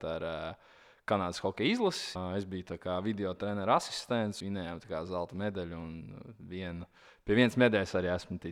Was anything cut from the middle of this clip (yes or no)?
yes